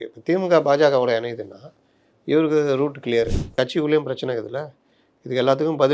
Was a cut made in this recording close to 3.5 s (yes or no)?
yes